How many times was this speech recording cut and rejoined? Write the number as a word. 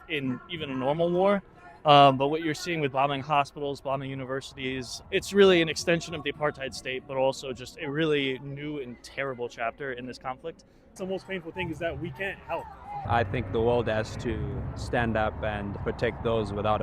four